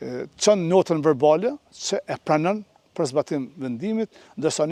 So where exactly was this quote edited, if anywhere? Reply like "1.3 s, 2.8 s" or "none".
none